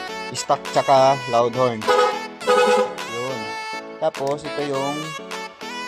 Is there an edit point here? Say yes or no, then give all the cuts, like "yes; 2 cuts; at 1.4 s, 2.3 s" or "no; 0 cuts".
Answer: no; 0 cuts